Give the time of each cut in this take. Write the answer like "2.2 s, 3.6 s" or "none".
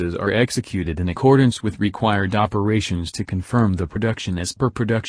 2.3 s